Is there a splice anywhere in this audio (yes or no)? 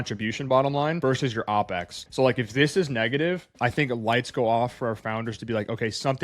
yes